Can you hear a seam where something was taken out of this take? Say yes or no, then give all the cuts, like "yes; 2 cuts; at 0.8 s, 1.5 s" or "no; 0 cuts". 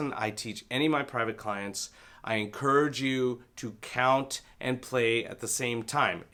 no; 0 cuts